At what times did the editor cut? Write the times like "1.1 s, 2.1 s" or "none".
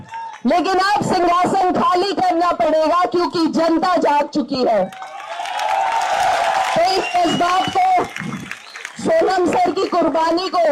none